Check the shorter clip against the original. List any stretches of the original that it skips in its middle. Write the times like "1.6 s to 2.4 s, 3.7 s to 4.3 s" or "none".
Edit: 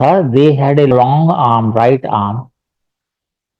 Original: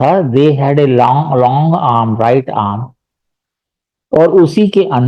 0.9 s to 1.4 s